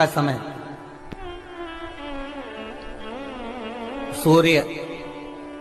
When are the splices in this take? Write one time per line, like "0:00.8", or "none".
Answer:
none